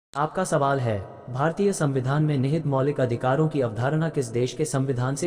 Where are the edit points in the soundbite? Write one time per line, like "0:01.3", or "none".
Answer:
none